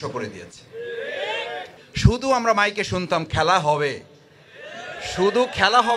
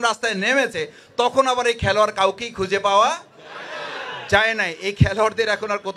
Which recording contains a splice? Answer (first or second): first